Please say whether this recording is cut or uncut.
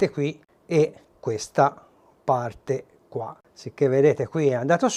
uncut